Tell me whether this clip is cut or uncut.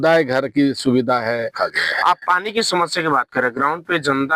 cut